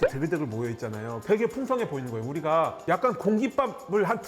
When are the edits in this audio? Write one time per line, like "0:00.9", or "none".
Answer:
none